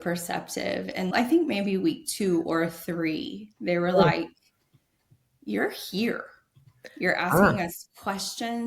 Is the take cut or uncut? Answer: cut